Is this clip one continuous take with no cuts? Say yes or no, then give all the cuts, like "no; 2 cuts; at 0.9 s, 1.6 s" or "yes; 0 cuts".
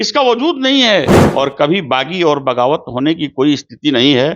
no; 1 cut; at 1.2 s